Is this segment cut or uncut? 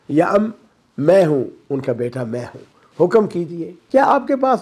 cut